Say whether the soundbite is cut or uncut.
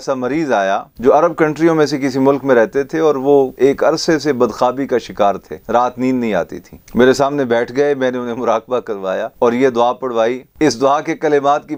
cut